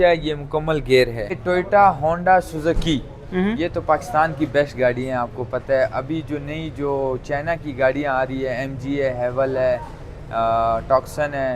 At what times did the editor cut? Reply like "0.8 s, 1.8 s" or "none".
1.4 s